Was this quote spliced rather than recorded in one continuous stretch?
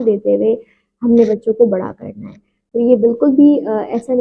no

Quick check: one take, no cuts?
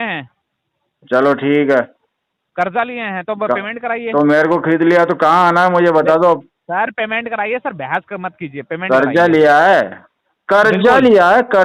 yes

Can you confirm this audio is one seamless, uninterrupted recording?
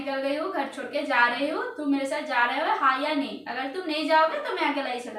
yes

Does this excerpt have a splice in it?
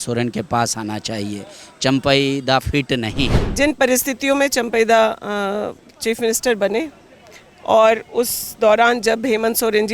yes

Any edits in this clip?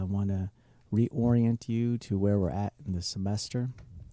yes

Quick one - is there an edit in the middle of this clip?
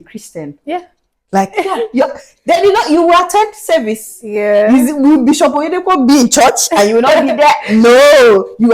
no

